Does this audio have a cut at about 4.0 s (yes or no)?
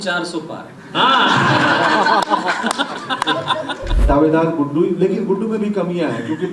yes